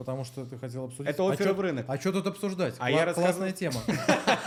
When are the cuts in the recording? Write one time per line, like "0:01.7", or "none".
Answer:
none